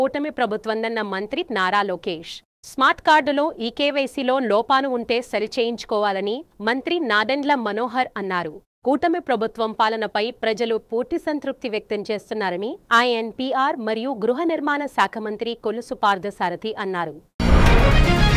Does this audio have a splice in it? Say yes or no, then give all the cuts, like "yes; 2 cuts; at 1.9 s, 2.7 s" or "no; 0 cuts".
yes; 1 cut; at 17.3 s